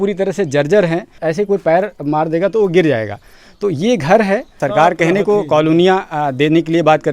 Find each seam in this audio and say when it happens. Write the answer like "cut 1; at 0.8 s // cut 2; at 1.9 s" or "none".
cut 1; at 1.1 s // cut 2; at 4.6 s

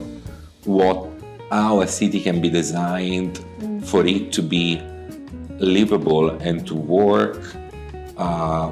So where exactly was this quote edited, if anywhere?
none

